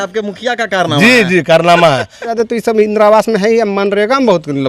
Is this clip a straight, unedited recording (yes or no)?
no